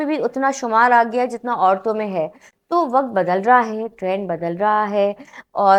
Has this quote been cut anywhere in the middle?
no; 0 cuts

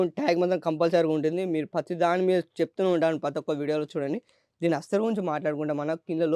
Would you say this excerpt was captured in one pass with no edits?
yes; 0 cuts

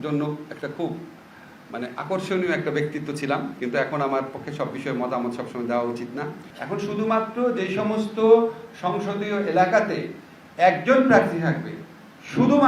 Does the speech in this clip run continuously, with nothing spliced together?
no; 1 cut; at 6.5 s

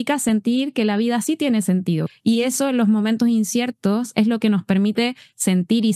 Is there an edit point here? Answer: yes; 1 cut; at 2.1 s

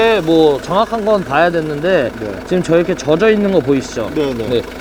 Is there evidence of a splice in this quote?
no; 0 cuts

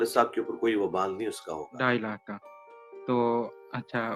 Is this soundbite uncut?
no; 1 cut; at 1.7 s

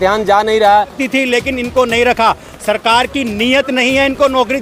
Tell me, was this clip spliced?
yes; 1 cut; at 1.0 s

